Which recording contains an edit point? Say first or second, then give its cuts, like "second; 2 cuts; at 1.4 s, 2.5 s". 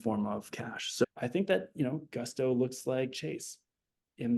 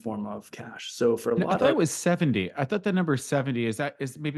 first; 1 cut; at 1.0 s